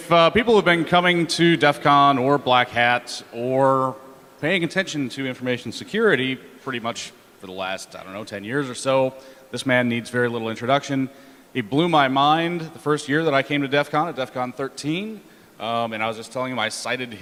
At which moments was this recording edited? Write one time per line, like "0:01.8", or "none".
none

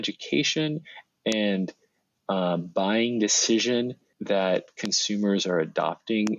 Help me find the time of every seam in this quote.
0:04.1

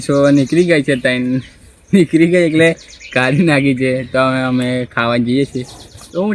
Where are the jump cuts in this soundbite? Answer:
none

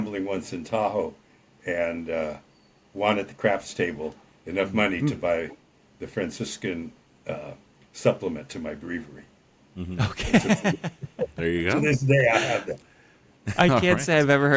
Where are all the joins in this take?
none

